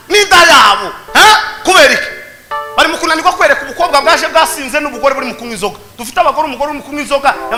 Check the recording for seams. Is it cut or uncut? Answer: uncut